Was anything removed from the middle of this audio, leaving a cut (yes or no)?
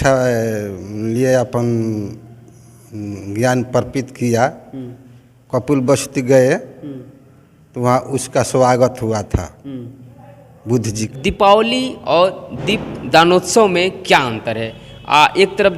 yes